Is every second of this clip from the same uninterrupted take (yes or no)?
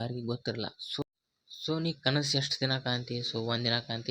no